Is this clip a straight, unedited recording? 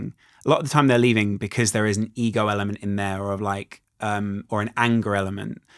yes; 0 cuts

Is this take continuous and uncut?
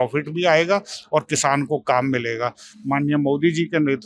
no; 1 cut; at 2.7 s

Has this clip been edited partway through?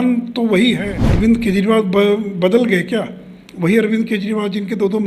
yes; 1 cut; at 1.0 s

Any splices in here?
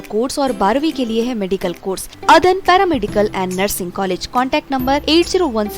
yes; 1 cut; at 2.1 s

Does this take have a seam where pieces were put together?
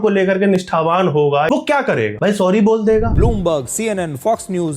yes; 2 cuts; at 1.5 s, 3.1 s

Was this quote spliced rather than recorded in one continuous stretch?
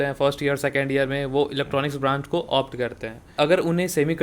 yes; 1 cut; at 3.3 s

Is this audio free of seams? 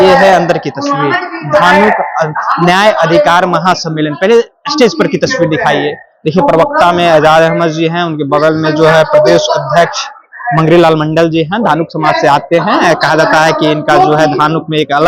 yes; 0 cuts

